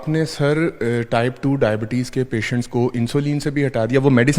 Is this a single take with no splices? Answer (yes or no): yes